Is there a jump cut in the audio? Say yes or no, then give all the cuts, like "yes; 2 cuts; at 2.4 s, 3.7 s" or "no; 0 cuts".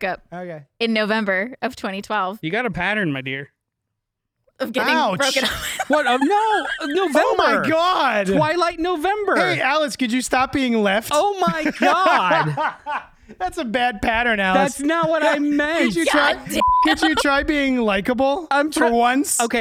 no; 0 cuts